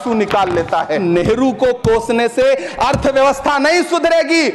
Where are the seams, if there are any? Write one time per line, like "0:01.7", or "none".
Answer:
none